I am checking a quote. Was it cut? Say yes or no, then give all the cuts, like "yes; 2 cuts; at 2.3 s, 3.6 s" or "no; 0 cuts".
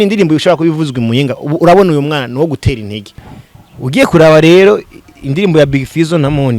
yes; 1 cut; at 3.1 s